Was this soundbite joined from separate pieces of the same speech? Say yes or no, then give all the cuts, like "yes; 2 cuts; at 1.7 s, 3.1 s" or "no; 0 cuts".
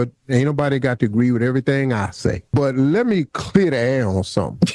yes; 1 cut; at 2.4 s